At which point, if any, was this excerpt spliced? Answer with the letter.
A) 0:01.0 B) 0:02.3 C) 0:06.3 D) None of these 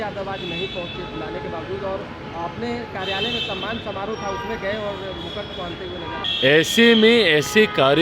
C